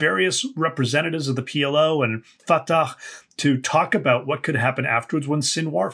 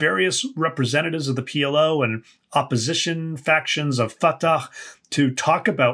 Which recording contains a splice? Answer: first; 1 cut; at 2.4 s

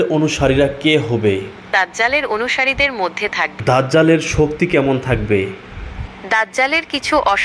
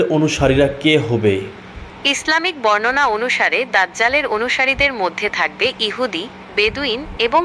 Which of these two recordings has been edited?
first; 2 cuts; at 1.7 s, 3.5 s

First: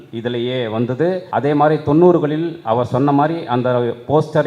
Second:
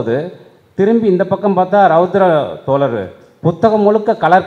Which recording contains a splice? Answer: first; 1 cut; at 1.2 s

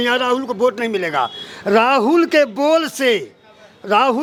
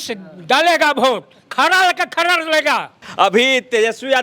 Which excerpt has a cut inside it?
second; 1 cut; at 3.0 s

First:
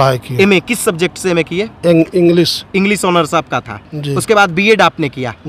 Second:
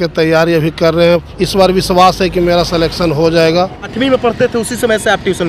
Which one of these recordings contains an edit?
second; 2 cuts; at 1.4 s, 3.9 s

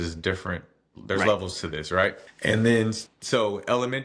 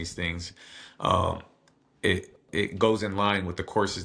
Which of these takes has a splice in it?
first; 2 cuts; at 2.3 s, 3.1 s

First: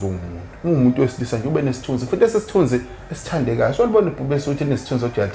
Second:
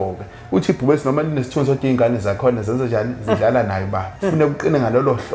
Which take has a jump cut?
second; 1 cut; at 4.0 s

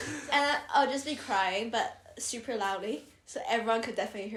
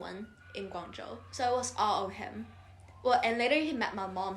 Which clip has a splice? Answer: second; 1 cut; at 1.2 s

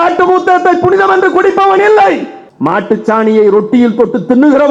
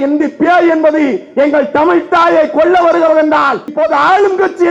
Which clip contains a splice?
second; 1 cut; at 3.7 s

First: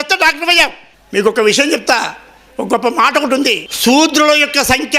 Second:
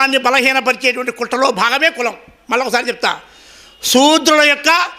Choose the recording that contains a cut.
first; 2 cuts; at 0.8 s, 3.7 s

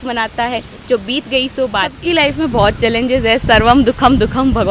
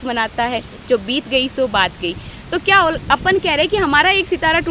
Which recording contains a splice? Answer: first; 1 cut; at 2.0 s

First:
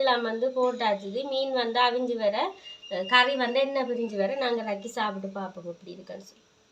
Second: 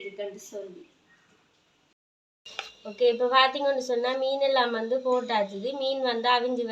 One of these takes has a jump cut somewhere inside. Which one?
second; 1 cut; at 1.9 s

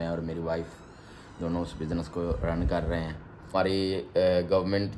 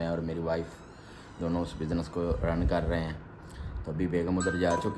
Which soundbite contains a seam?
first; 1 cut; at 3.5 s

